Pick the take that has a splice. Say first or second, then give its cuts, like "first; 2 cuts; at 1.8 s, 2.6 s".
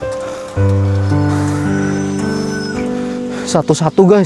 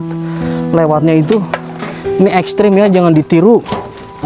first; 1 cut; at 2.9 s